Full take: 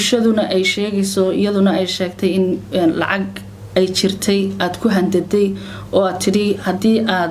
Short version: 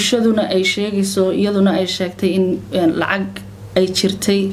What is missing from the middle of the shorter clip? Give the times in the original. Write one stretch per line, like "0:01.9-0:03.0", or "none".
none

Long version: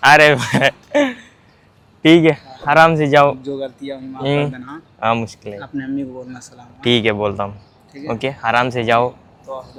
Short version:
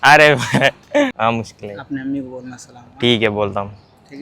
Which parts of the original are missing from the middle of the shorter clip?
0:01.1-0:05.0

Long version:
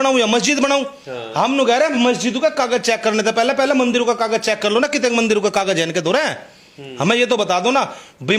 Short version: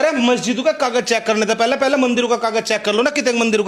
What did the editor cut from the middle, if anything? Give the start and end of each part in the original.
none

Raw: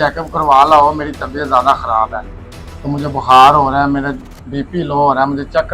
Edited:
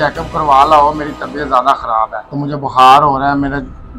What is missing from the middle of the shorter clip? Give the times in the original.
0:02.2-0:02.7

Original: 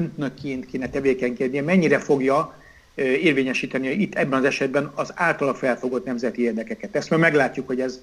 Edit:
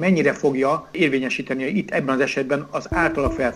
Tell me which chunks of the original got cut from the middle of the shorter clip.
0:02.6-0:03.2

